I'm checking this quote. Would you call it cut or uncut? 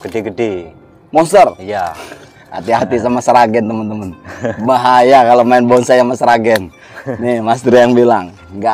uncut